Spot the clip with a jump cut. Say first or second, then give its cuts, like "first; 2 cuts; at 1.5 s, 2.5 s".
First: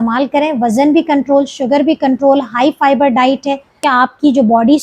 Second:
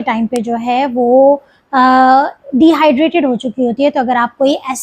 first; 1 cut; at 3.8 s